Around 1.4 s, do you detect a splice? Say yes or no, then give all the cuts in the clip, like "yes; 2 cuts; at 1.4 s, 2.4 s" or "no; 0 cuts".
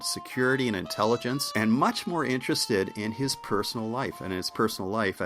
yes; 1 cut; at 1.4 s